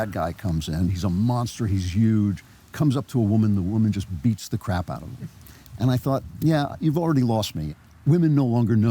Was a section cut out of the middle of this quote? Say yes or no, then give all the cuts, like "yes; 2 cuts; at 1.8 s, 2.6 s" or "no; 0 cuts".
yes; 2 cuts; at 1.0 s, 7.7 s